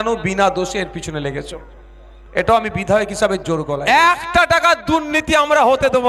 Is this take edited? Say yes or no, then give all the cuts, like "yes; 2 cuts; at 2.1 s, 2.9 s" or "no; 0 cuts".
yes; 1 cut; at 3.7 s